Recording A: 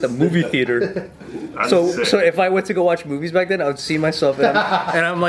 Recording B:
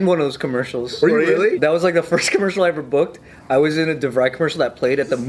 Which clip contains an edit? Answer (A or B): B